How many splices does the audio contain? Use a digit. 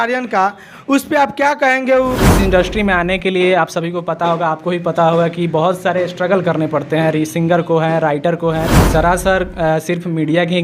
2